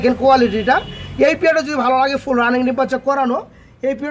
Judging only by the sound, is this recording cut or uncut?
uncut